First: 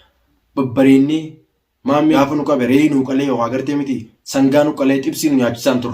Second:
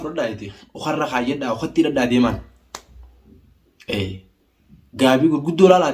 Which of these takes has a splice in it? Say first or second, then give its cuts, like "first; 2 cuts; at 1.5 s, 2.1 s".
first; 1 cut; at 2.2 s